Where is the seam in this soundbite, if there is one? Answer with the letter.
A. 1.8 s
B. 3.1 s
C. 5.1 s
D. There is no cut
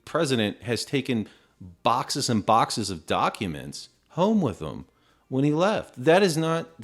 D